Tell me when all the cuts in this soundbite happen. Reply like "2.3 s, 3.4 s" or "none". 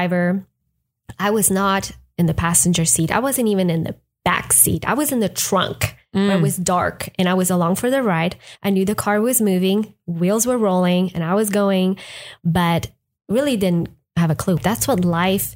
14.6 s

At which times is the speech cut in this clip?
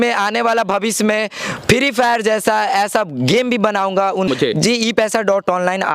4.3 s

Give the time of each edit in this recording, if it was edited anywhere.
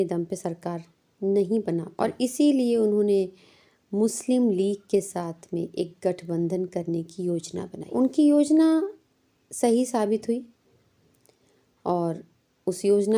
1.9 s, 7.8 s

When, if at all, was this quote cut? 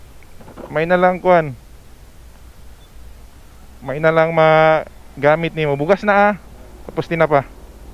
none

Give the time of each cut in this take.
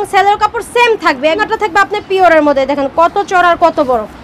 1.4 s

